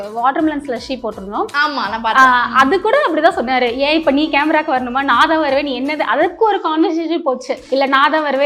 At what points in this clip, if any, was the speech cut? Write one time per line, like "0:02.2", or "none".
0:07.5